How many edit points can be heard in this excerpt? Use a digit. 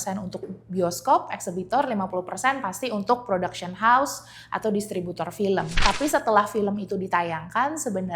1